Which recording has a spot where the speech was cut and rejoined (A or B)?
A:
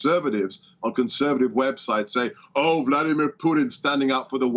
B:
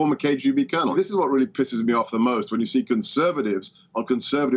B